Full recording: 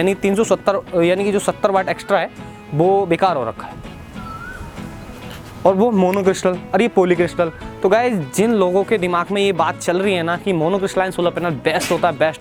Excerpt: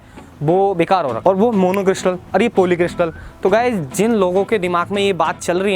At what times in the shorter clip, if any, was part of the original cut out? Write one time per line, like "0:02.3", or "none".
0:01.2

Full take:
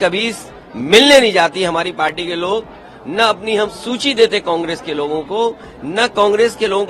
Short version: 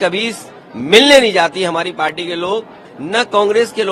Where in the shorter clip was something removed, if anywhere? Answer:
0:02.9

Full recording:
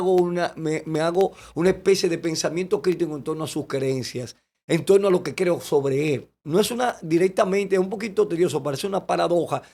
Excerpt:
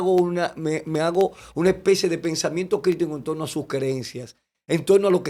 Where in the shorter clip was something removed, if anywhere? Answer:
none

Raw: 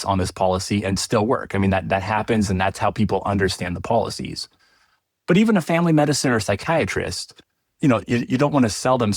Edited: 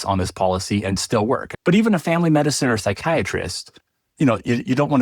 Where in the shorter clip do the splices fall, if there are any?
0:01.5

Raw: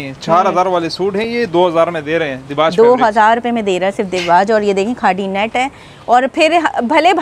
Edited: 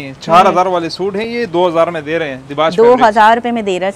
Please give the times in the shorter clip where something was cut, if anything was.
none

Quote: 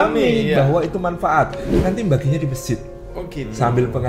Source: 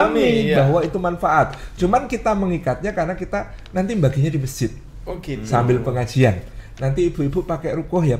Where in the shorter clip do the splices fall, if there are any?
0:01.6

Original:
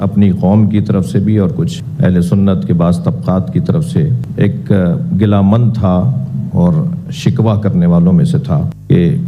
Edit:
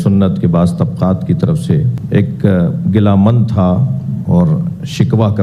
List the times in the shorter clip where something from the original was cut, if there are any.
none

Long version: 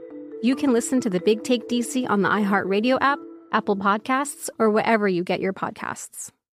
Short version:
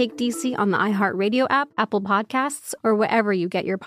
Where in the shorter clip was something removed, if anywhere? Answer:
0:01.7

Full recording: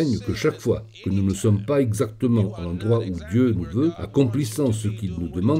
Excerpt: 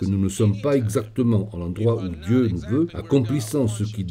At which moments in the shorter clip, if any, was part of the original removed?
none

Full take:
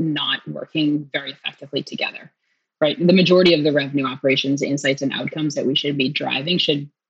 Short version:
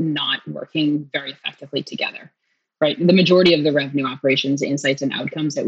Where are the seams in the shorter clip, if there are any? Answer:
none

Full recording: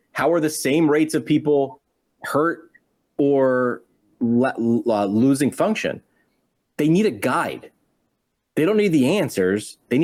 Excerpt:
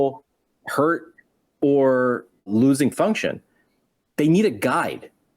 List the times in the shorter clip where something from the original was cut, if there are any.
0:02.5

